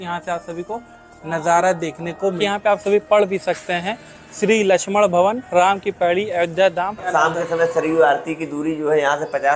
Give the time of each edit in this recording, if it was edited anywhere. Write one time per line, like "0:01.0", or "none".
0:02.4
0:07.1